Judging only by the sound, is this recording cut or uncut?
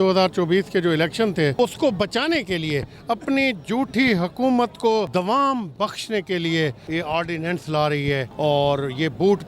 cut